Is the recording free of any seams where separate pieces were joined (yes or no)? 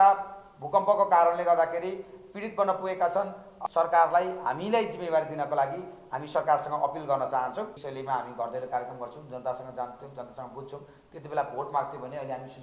no